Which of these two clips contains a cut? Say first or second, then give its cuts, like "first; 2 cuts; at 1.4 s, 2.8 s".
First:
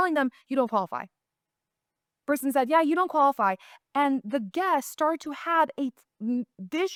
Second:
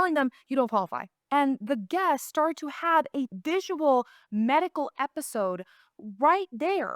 second; 2 cuts; at 1.1 s, 3.3 s